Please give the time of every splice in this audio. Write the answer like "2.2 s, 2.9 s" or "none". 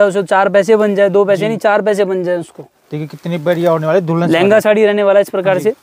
none